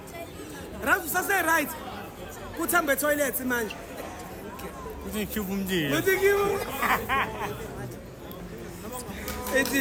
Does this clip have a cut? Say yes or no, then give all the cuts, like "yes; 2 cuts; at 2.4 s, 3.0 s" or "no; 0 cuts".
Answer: no; 0 cuts